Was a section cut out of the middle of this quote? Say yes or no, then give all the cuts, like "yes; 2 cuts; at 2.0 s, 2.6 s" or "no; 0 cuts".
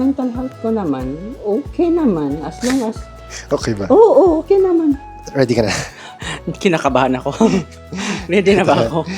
yes; 2 cuts; at 1.3 s, 5.1 s